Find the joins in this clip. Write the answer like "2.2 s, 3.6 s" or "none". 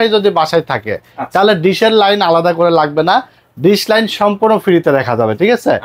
none